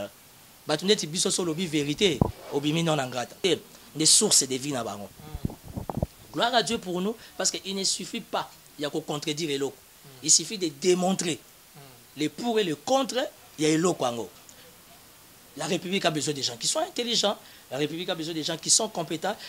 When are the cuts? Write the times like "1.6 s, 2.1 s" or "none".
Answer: 3.4 s

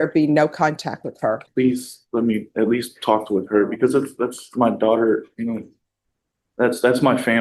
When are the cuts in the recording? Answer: 1.4 s

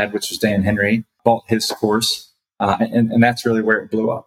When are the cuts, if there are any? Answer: 1.2 s

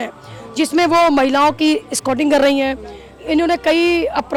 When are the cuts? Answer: none

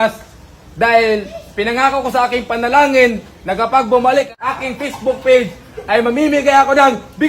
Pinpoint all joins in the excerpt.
4.3 s

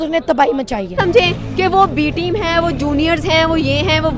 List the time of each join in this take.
1.0 s

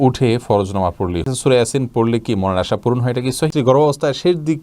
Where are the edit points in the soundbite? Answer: 1.3 s, 3.5 s

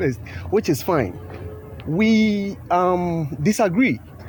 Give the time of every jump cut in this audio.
none

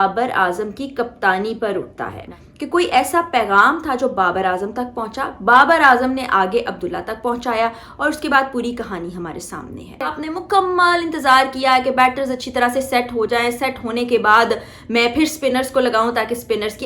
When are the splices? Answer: 2.3 s, 10.1 s

